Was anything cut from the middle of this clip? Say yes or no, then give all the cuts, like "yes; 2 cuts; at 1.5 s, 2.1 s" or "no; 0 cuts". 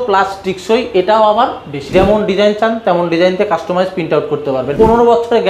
yes; 2 cuts; at 1.7 s, 4.7 s